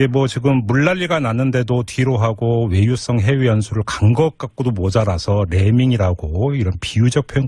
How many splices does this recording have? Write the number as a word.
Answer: one